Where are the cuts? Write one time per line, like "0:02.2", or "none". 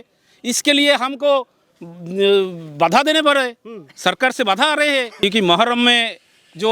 0:05.2